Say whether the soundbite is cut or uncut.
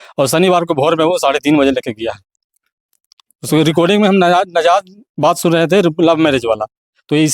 uncut